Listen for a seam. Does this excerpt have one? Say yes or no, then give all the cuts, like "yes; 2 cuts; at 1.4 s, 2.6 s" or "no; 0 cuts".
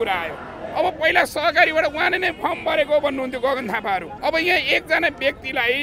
yes; 1 cut; at 4.1 s